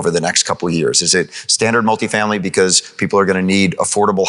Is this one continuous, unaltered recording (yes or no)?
yes